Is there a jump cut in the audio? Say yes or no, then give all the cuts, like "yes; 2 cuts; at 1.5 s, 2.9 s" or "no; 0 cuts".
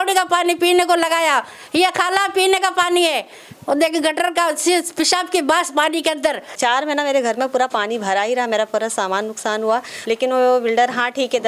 yes; 2 cuts; at 6.6 s, 9.9 s